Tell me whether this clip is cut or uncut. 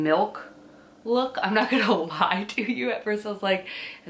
uncut